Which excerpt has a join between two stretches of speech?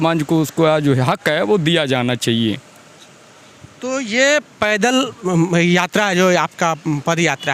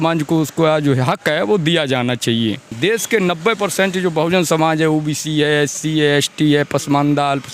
second; 1 cut; at 2.7 s

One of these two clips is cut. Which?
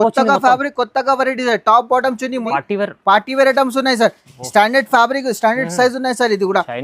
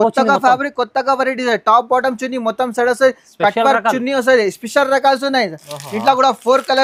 first; 1 cut; at 2.5 s

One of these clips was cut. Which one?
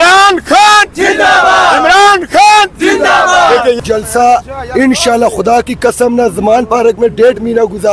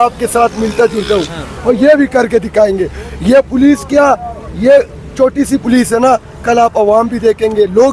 first; 1 cut; at 3.8 s

